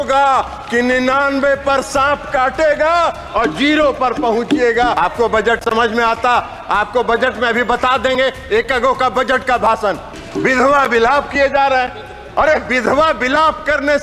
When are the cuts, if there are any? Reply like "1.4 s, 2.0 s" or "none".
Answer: 5.0 s, 10.1 s